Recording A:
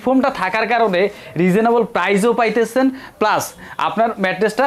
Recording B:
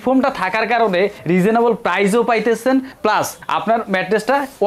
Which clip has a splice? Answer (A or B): B